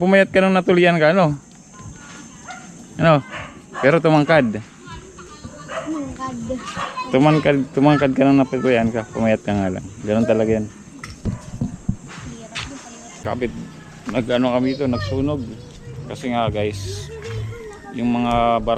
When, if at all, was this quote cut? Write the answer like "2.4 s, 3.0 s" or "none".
13.2 s